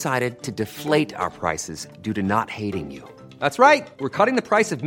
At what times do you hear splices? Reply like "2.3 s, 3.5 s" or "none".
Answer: none